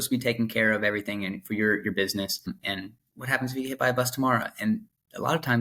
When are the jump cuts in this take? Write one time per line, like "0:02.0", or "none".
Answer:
0:02.5